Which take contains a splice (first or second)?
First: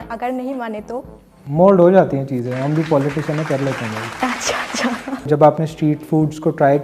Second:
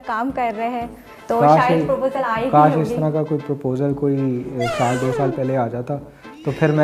first